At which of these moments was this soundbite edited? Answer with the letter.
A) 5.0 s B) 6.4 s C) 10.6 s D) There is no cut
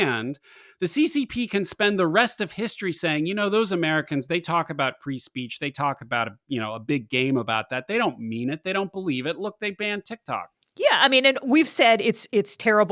C